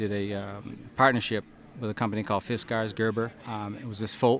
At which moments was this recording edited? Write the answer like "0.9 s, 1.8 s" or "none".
3.4 s